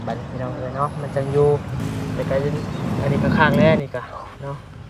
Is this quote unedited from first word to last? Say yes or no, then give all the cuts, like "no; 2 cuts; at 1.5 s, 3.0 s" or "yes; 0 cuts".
no; 1 cut; at 1.8 s